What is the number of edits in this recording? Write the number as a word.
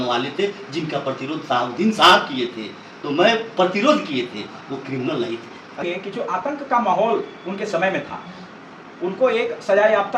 one